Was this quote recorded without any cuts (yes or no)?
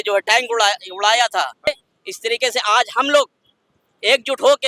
no